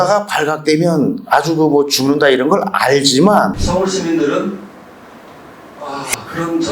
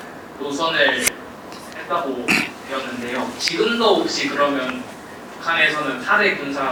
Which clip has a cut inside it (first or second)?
first